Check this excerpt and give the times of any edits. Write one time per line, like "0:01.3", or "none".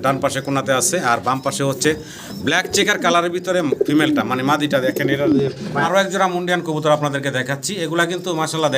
0:05.8